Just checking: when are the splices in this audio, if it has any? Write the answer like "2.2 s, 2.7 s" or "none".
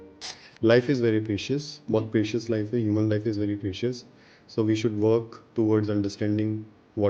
none